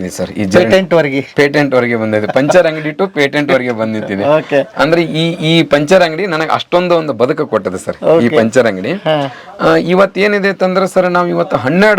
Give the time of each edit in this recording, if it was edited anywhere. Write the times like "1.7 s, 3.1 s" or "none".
none

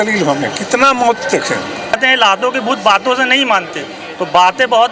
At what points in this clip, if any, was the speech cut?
1.9 s

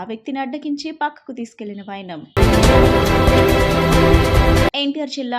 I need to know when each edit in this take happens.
none

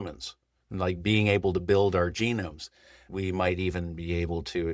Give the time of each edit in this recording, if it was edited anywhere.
3.1 s

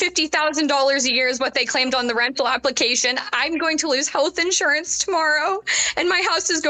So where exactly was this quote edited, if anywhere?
none

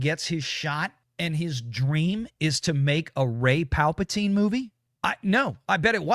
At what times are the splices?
1.0 s

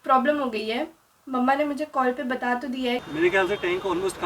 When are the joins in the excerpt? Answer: 3.0 s

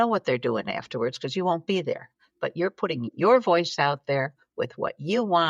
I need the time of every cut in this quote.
none

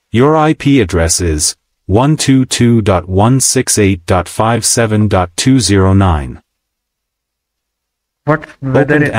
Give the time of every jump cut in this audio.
none

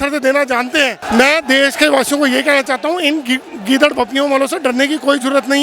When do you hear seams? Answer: 1.0 s

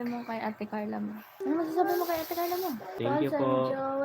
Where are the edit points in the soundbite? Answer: 1.3 s, 3.0 s

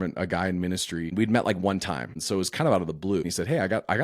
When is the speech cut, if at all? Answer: 1.1 s, 2.1 s, 3.2 s

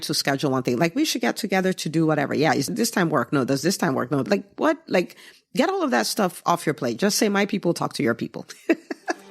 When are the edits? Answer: 2.7 s, 4.2 s

